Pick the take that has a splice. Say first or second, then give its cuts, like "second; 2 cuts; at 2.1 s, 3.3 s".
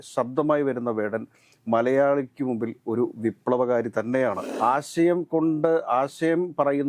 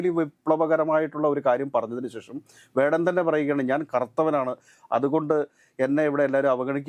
first; 1 cut; at 4.5 s